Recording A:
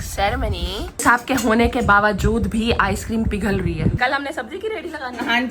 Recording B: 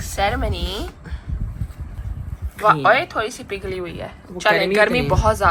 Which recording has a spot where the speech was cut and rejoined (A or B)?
A